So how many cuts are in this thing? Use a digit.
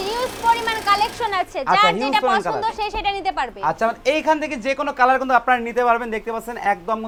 0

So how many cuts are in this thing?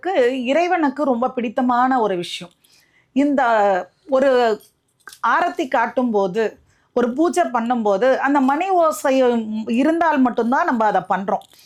0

